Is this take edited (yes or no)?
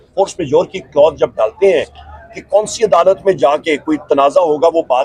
no